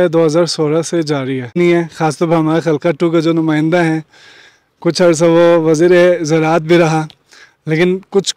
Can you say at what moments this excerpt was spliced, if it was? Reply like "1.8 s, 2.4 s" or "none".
1.6 s